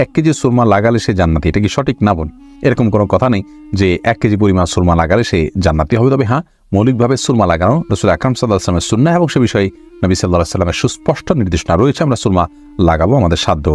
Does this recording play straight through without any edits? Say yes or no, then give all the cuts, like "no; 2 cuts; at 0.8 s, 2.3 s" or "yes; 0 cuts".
yes; 0 cuts